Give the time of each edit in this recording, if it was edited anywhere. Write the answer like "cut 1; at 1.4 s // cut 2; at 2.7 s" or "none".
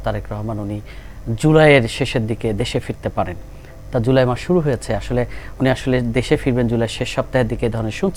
none